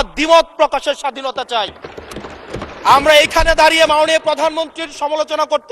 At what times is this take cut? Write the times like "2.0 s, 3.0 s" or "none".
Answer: none

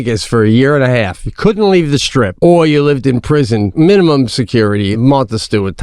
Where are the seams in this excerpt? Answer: 2.3 s, 3.7 s, 4.9 s

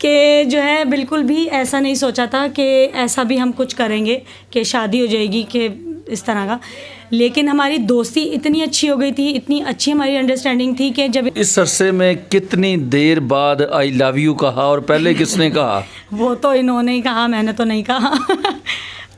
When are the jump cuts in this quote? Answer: 11.3 s

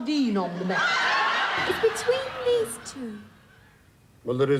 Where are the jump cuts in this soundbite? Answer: 1.6 s

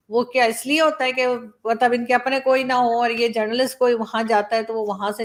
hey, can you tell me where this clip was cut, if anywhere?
none

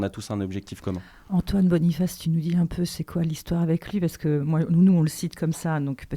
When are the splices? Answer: none

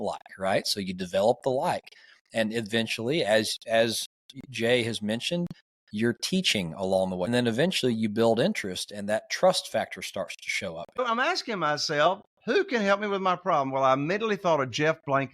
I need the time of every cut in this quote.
7.3 s, 11.0 s

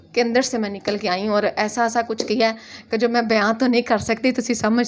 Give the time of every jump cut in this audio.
none

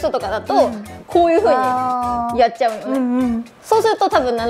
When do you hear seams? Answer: 0.9 s, 3.5 s

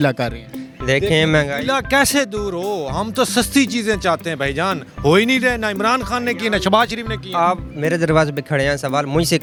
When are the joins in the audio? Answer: none

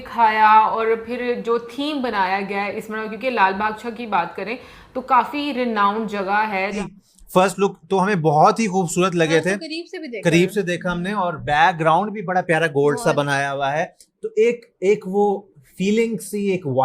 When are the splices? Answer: 6.8 s

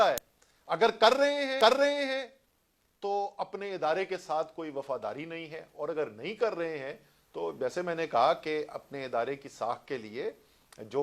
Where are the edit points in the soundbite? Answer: none

